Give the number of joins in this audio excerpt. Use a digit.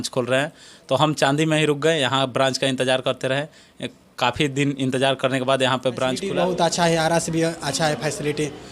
1